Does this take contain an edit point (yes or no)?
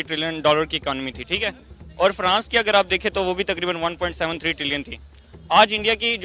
no